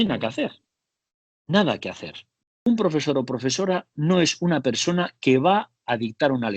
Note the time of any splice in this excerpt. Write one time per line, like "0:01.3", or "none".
0:02.7